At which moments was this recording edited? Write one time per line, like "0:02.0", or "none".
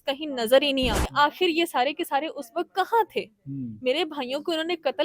0:01.0